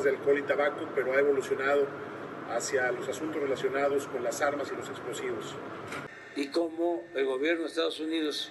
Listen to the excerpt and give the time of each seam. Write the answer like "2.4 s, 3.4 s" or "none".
6.1 s